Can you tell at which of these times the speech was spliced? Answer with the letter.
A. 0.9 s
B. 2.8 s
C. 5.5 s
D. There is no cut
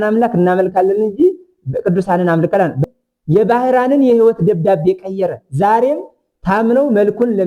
B